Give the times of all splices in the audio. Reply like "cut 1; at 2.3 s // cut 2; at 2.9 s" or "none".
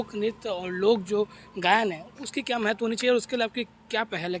none